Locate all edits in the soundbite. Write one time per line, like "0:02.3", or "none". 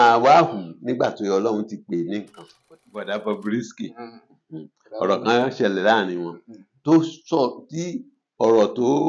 0:02.6